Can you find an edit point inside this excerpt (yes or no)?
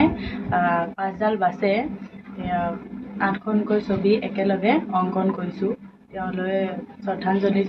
no